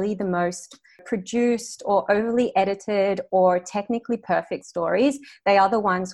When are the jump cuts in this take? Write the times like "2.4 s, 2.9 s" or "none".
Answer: 1.0 s

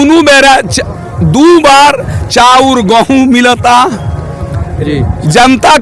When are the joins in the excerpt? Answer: none

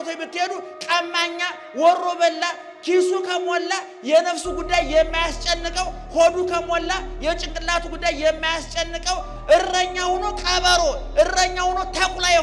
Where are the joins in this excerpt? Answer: 9.3 s

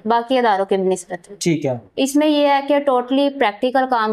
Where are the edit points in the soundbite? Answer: none

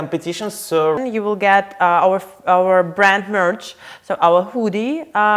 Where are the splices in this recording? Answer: 1.0 s

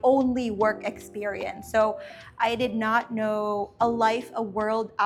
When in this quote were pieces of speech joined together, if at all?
none

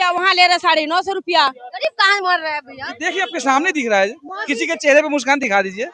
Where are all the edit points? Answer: 1.7 s

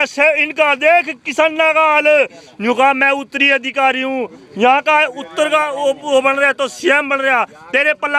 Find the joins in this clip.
none

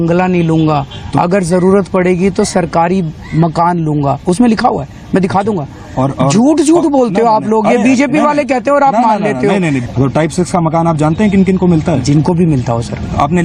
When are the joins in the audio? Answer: 9.8 s

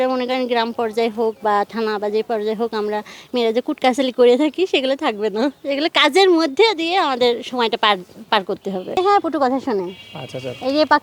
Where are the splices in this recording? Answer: 9.0 s

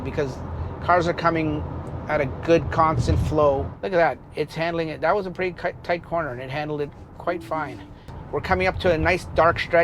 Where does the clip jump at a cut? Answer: 3.7 s, 8.1 s

